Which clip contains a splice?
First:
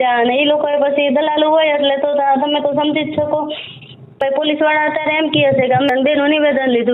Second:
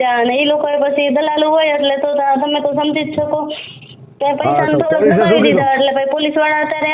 first; 2 cuts; at 4.2 s, 5.9 s

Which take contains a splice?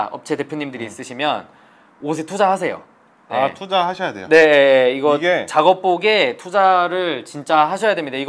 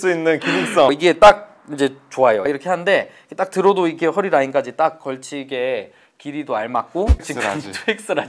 second; 3 cuts; at 0.9 s, 2.6 s, 7.2 s

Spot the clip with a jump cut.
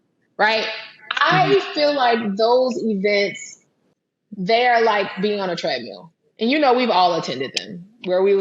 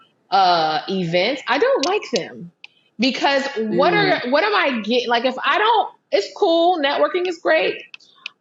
first; 1 cut; at 3.8 s

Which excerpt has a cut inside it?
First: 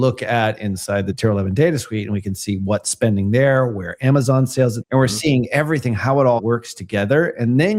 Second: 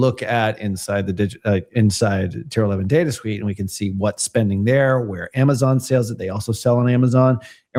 first; 3 cuts; at 1.1 s, 4.8 s, 6.4 s

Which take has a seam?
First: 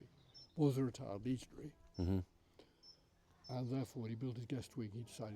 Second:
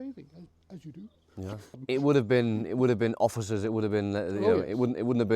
second; 1 cut; at 1.8 s

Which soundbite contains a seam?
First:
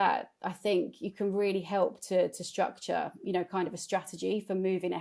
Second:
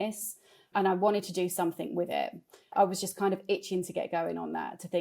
second; 1 cut; at 2.7 s

